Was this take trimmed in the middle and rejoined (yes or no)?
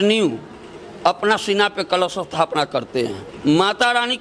yes